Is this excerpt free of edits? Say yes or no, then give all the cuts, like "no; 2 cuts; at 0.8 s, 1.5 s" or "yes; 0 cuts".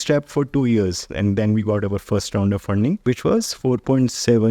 no; 1 cut; at 3.0 s